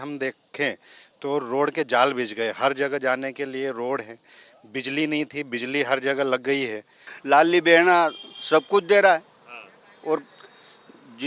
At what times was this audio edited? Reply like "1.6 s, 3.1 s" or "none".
7.1 s